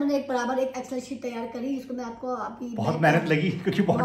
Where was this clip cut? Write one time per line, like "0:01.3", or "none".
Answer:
none